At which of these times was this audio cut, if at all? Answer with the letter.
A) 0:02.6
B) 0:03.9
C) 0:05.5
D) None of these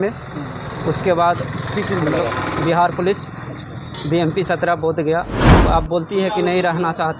C